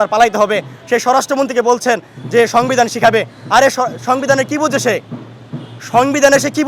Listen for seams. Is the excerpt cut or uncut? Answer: uncut